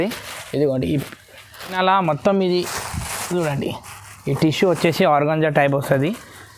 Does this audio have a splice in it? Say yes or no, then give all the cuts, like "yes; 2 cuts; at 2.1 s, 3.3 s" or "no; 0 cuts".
yes; 1 cut; at 1.8 s